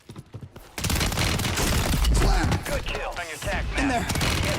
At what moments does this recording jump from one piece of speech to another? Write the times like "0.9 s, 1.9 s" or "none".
3.3 s

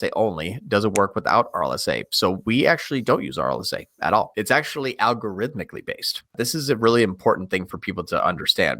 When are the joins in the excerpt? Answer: 4.3 s, 6.3 s

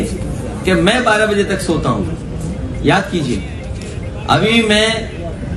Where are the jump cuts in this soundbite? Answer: none

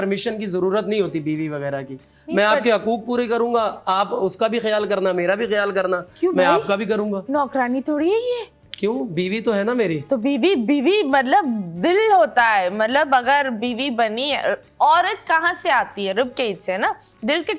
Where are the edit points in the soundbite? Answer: none

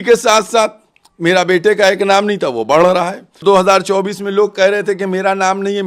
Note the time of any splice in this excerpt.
3.4 s

